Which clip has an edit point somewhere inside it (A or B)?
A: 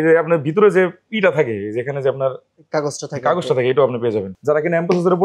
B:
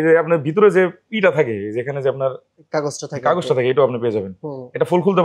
A